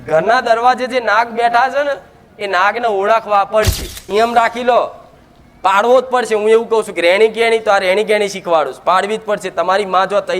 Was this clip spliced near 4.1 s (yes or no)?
yes